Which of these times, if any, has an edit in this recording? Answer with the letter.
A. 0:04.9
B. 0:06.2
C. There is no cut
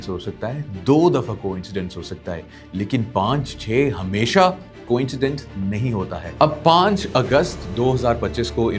B